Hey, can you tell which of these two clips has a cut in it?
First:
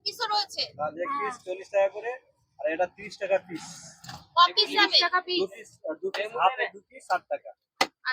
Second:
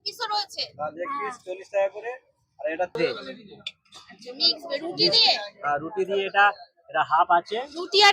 second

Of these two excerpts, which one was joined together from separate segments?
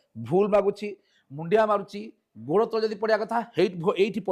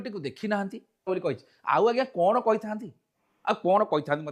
second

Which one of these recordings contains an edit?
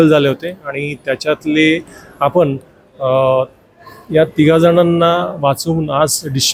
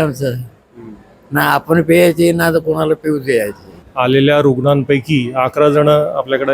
second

